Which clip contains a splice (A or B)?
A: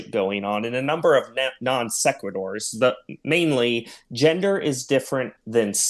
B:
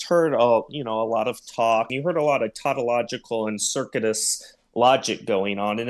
B